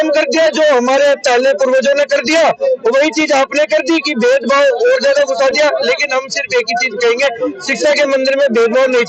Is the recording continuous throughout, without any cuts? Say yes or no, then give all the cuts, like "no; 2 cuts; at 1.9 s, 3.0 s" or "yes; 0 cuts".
yes; 0 cuts